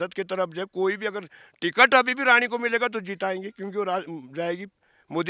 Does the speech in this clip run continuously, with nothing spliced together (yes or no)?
yes